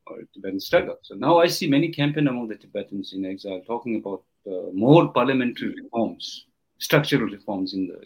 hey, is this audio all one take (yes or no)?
no